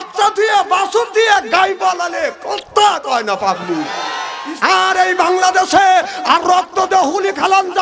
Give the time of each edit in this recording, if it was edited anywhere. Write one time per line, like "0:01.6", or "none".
0:04.2